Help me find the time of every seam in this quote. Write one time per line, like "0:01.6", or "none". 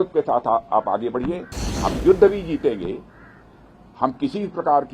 0:01.5